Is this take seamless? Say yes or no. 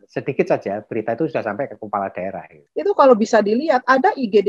no